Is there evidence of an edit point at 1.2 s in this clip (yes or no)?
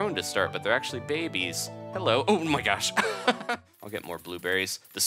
no